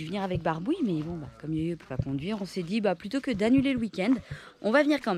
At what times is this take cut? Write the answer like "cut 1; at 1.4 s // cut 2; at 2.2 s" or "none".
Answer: none